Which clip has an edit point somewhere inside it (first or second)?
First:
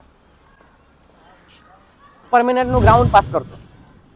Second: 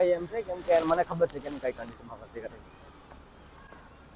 first